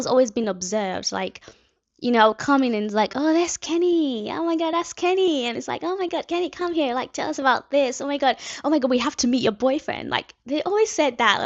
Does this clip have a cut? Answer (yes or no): no